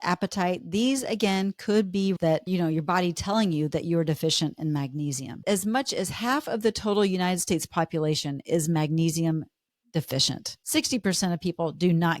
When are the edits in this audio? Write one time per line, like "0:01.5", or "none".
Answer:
0:02.2
0:05.4
0:10.5